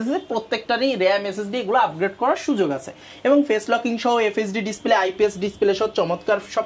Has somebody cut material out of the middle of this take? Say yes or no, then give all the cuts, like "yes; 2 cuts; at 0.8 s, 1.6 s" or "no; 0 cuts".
no; 0 cuts